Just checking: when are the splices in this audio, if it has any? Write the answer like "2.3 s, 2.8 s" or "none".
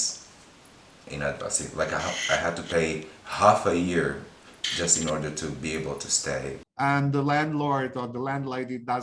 6.6 s